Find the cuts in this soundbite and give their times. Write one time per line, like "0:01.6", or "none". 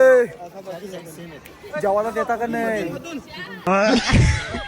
none

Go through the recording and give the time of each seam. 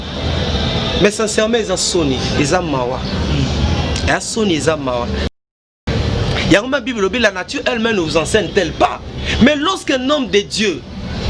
0:05.3

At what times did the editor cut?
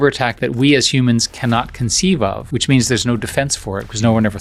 none

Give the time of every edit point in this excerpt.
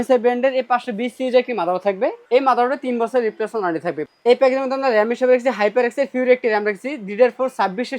0:02.2
0:04.0

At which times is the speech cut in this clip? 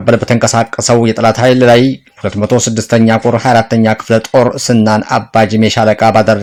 none

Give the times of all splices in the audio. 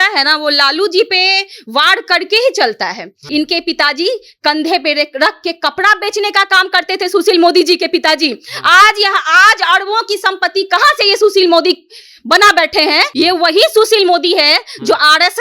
0:03.2
0:13.1

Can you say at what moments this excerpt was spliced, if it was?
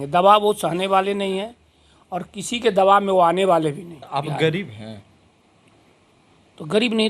0:03.9

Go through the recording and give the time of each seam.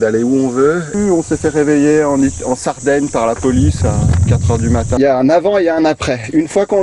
0:01.0
0:05.0

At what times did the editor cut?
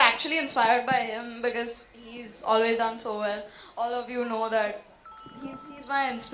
none

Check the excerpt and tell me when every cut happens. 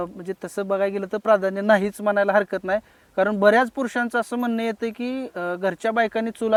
none

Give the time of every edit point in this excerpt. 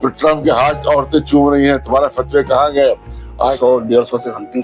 0:03.6

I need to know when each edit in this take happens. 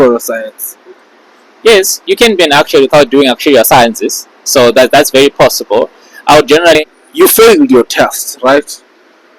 0:06.8

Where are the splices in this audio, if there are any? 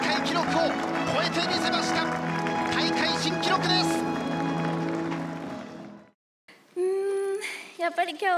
0:05.8

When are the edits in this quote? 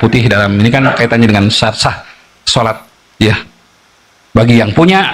none

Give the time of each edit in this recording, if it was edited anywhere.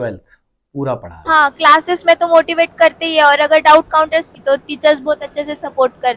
0:01.2
0:04.3

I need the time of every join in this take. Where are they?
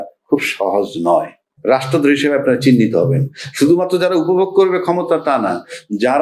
0:01.4

